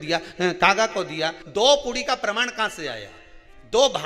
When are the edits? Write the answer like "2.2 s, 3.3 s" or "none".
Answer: 1.4 s

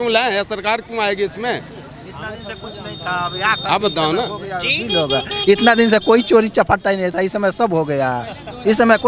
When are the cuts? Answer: none

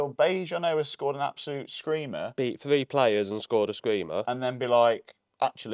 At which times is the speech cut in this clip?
none

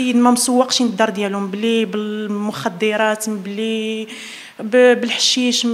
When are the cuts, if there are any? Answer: none

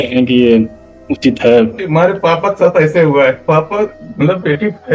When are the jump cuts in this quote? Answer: 1.8 s, 3.4 s

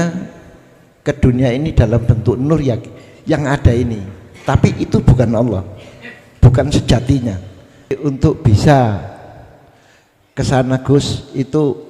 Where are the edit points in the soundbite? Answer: 7.9 s

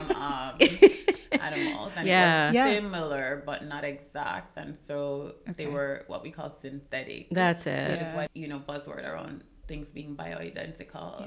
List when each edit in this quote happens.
8.3 s

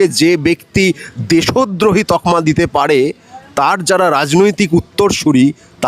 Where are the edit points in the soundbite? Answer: none

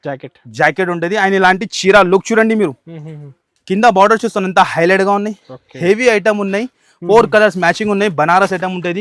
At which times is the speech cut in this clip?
none

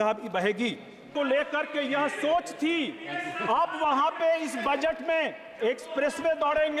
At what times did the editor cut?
1.1 s

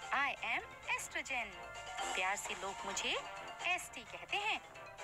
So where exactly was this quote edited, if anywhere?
none

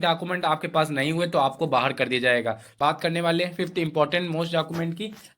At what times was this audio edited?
2.7 s

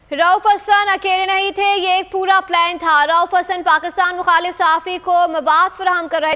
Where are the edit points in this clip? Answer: none

